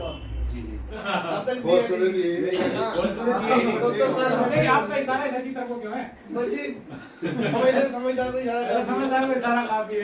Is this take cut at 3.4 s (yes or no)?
no